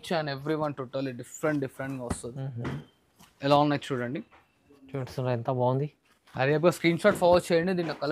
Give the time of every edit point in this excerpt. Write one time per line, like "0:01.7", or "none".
none